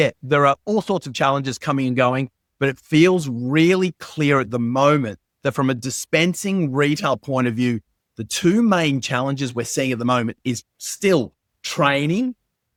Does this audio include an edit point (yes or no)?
no